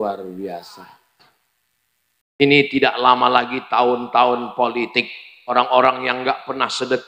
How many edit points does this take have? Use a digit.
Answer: 1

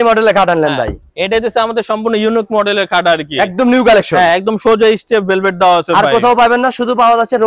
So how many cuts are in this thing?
0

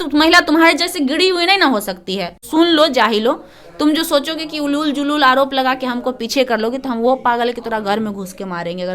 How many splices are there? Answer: 1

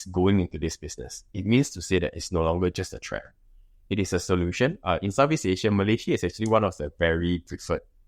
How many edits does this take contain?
1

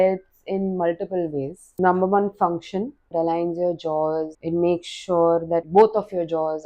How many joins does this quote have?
4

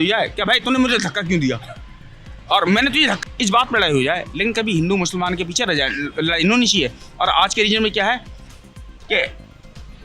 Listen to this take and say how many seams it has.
1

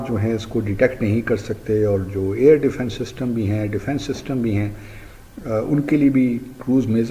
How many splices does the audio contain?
0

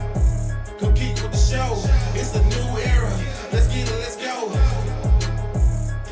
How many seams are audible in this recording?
1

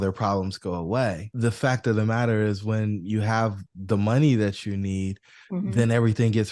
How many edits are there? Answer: 1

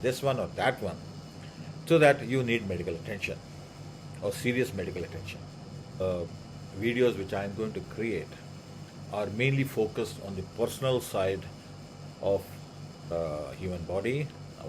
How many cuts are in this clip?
2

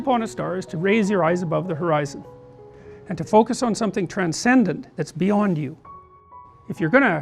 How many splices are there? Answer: 1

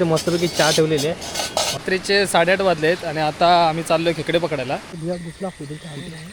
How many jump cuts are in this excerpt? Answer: 2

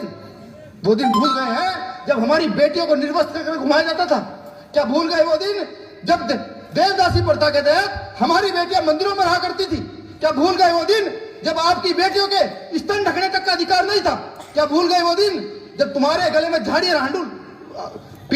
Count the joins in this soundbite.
0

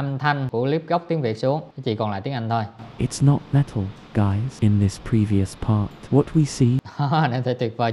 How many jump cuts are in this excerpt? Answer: 2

